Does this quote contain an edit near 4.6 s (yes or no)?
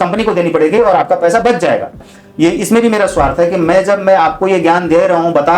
no